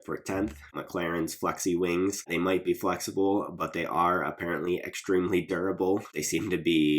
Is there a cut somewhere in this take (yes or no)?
yes